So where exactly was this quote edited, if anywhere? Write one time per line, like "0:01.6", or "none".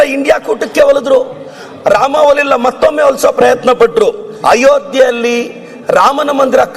0:04.3